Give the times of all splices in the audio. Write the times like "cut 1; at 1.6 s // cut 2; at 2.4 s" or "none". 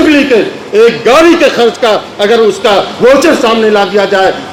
none